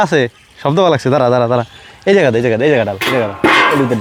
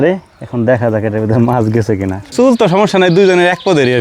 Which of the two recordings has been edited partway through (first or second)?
second